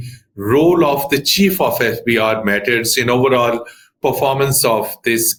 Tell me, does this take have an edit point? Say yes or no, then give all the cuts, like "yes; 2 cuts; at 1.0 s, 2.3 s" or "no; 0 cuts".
no; 0 cuts